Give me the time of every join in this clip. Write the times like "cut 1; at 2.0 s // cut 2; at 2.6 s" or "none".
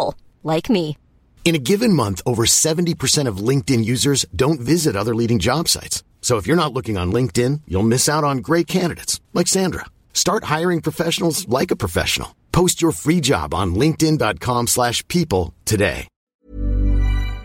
cut 1; at 16.2 s